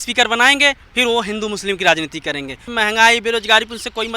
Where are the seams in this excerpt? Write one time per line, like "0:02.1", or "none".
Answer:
0:02.7